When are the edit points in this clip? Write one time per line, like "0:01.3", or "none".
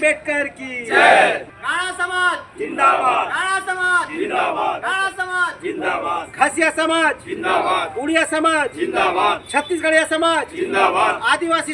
0:01.5